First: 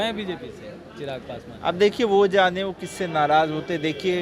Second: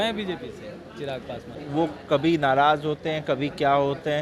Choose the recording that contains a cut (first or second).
second